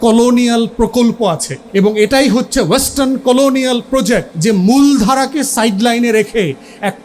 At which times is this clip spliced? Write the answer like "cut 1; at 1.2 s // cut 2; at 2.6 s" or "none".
cut 1; at 1.5 s // cut 2; at 4.3 s